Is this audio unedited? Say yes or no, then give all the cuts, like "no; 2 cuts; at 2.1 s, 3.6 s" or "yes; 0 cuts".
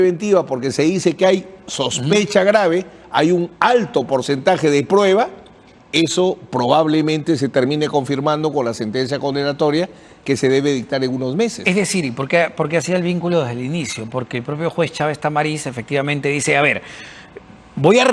yes; 0 cuts